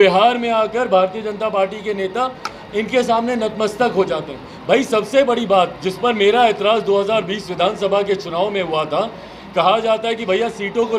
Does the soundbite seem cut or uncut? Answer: uncut